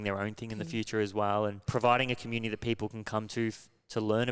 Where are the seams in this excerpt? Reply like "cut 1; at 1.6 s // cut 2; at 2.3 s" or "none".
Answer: cut 1; at 1.6 s